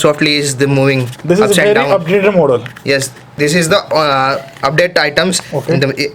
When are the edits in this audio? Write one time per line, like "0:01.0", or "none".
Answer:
0:03.4